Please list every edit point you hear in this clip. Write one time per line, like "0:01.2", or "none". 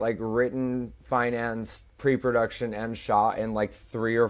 none